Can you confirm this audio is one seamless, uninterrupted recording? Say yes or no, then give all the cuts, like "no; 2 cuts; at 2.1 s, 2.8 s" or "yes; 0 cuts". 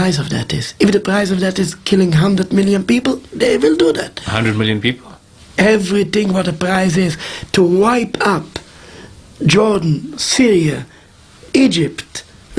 yes; 0 cuts